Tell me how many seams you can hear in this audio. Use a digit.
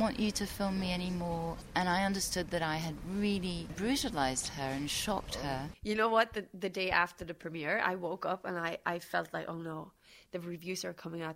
2